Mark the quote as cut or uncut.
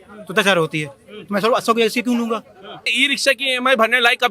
cut